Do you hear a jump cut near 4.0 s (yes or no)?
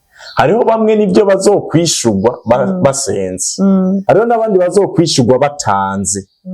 yes